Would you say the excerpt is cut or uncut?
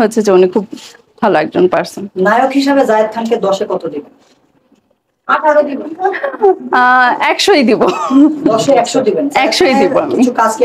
uncut